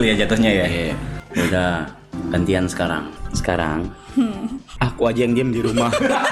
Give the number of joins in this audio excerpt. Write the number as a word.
four